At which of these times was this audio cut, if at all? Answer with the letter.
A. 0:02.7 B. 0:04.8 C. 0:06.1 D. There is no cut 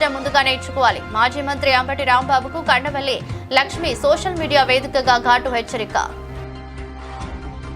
C